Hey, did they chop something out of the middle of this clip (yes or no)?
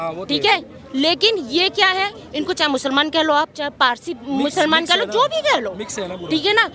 no